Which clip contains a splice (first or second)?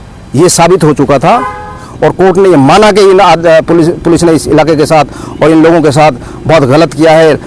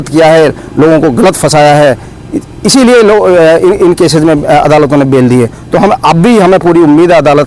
first